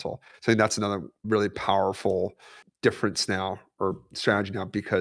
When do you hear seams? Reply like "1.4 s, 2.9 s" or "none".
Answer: 1.1 s